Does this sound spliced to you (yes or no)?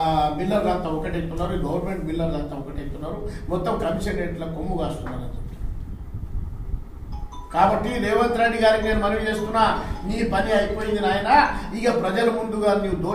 no